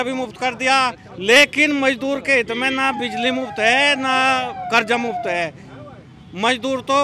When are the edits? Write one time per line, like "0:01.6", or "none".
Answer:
none